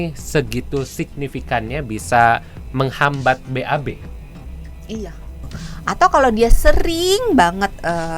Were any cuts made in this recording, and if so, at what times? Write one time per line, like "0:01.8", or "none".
0:05.5